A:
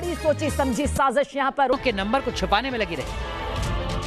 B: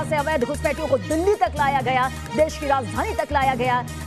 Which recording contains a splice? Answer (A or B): A